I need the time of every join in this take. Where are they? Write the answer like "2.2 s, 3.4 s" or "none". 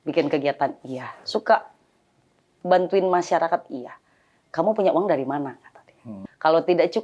6.1 s

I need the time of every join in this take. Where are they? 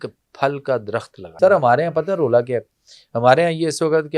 1.3 s

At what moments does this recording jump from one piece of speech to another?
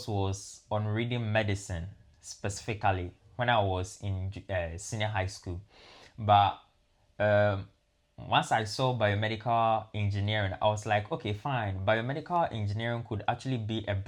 none

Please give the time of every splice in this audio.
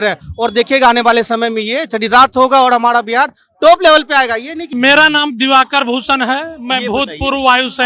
4.6 s

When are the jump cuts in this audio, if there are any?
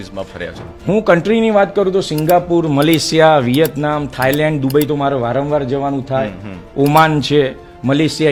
none

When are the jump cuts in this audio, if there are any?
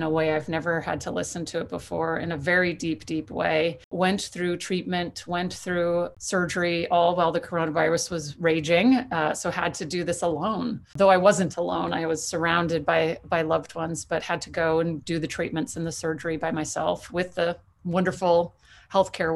3.9 s, 6.1 s, 10.9 s

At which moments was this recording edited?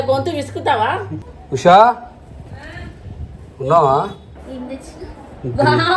1.2 s, 4.4 s

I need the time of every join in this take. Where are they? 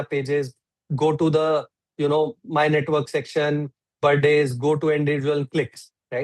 none

